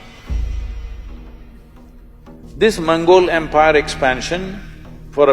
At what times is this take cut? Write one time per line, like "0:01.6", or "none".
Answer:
0:02.4